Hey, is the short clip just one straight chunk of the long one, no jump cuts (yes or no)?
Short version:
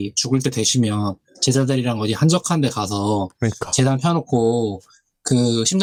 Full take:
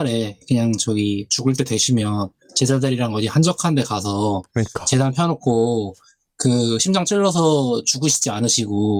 yes